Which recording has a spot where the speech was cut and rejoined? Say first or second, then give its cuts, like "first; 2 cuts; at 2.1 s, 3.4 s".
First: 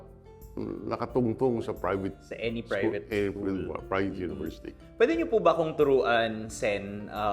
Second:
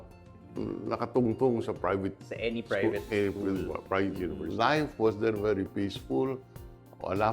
second; 1 cut; at 4.5 s